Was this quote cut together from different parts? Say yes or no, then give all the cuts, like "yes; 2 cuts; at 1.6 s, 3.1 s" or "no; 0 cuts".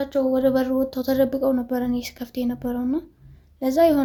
no; 0 cuts